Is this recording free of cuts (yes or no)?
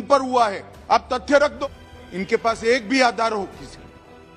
no